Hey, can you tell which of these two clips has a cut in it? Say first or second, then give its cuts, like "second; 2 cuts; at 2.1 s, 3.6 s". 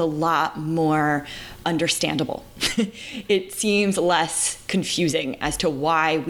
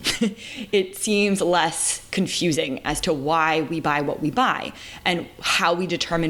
first; 1 cut; at 1.6 s